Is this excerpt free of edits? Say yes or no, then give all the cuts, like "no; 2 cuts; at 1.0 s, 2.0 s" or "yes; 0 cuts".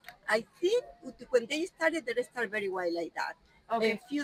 yes; 0 cuts